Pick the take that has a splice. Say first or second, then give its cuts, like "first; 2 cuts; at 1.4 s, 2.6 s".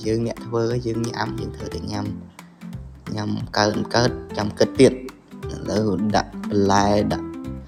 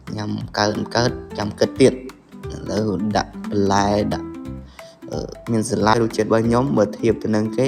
second; 1 cut; at 6.0 s